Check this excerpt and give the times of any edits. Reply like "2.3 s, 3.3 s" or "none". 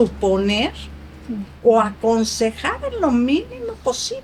none